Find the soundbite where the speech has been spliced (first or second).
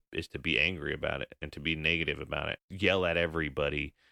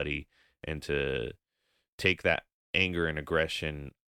first